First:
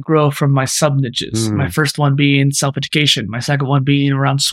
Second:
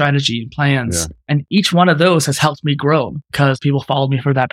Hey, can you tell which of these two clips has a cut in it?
second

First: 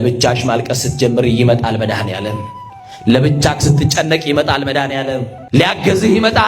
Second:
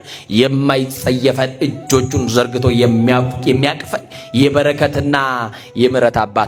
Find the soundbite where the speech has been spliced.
first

